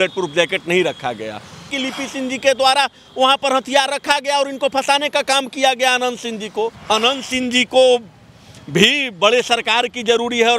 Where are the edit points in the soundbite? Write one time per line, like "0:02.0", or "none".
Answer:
0:01.8
0:06.8